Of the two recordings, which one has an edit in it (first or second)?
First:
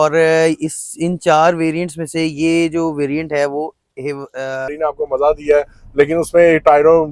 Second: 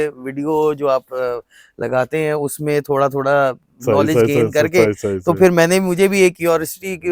first